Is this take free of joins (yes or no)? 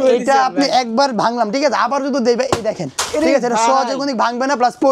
yes